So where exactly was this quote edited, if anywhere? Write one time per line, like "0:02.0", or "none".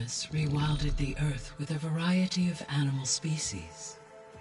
none

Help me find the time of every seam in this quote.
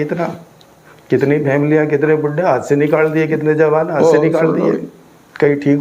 none

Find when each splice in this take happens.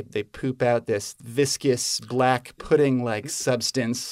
0:01.2

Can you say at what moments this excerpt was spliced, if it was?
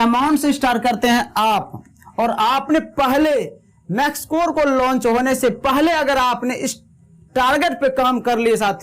none

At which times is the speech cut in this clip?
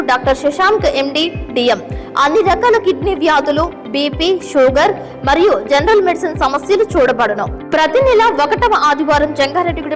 none

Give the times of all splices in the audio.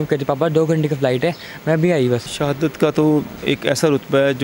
0:02.3

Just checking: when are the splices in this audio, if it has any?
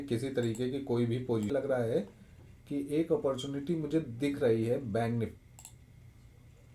0:01.5
0:05.3

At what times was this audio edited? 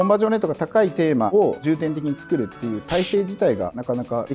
none

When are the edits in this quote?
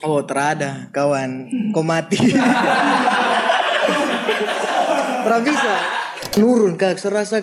0:06.4

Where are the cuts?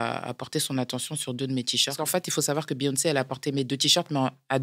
0:01.9

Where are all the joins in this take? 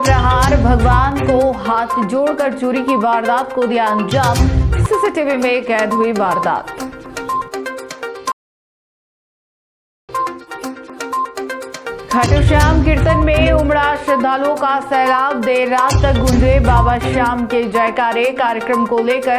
none

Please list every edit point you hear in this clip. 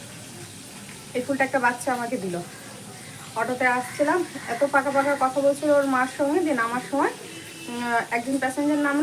none

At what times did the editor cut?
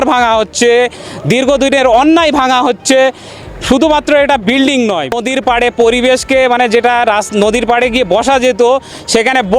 0:05.2

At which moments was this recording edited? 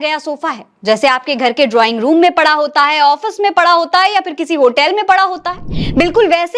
none

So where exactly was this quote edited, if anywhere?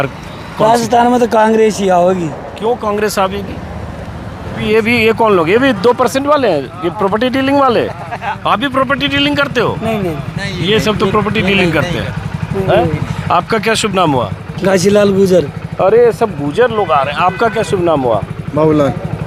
none

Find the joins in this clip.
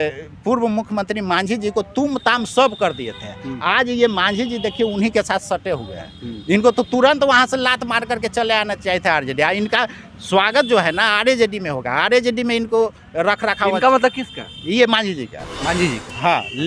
none

